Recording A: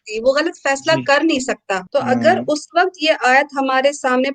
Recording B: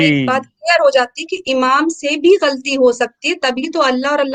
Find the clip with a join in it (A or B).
A